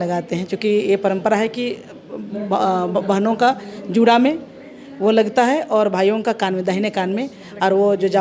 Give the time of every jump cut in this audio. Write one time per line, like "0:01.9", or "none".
none